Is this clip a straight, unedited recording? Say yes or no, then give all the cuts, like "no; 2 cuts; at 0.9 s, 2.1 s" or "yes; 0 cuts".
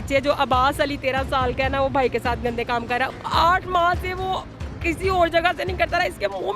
no; 1 cut; at 3.1 s